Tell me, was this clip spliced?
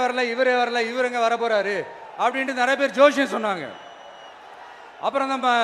no; 0 cuts

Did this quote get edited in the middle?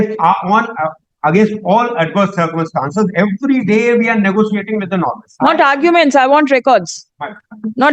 yes; 1 cut; at 5.2 s

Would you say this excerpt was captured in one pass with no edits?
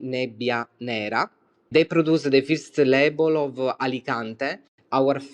yes; 0 cuts

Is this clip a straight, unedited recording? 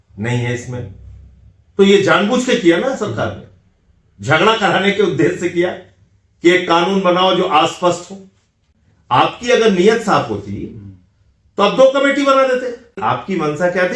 no; 1 cut; at 13.0 s

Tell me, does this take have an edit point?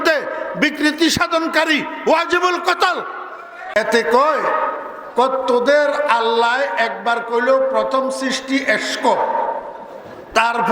yes; 1 cut; at 3.8 s

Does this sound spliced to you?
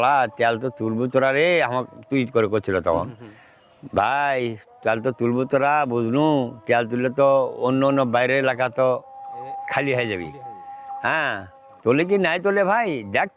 no; 0 cuts

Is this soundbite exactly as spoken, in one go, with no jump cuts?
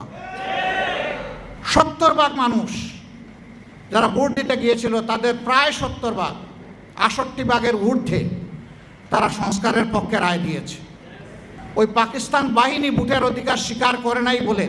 no; 2 cuts; at 1.5 s, 11.5 s

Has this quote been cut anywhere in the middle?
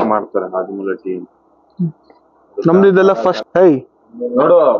yes; 1 cut; at 3.4 s

